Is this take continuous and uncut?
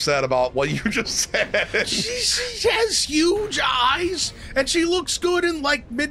yes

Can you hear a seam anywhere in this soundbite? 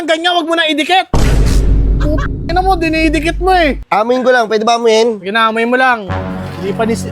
yes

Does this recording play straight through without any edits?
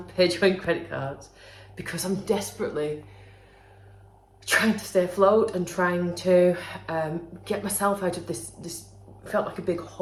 yes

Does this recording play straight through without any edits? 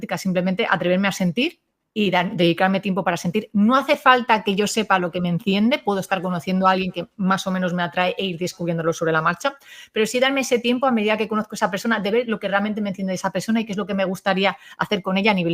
yes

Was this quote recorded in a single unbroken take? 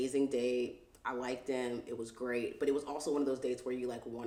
yes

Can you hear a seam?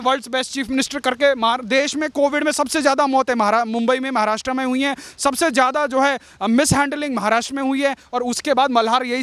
no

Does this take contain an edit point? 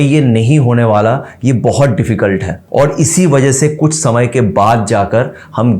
yes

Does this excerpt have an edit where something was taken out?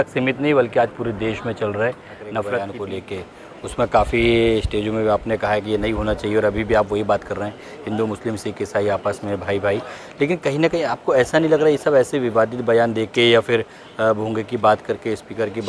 yes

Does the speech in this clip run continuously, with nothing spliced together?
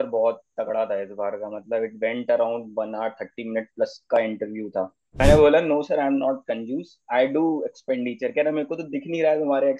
no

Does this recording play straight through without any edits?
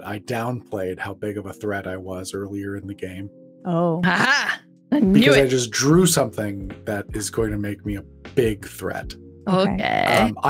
yes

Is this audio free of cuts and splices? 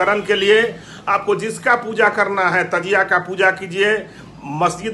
yes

